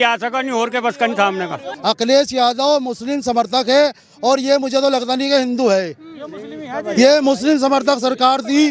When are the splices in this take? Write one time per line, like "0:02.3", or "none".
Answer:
0:01.7